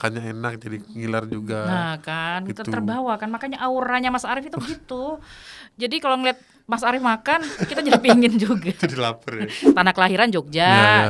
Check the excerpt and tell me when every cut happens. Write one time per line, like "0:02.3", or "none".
0:09.5